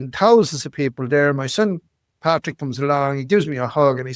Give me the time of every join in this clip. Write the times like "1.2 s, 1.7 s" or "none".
none